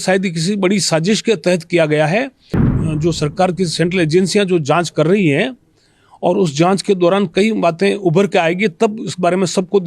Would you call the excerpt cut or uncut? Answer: cut